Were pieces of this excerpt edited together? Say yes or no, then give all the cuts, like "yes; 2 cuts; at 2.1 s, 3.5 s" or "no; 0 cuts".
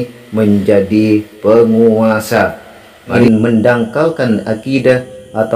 yes; 1 cut; at 3.2 s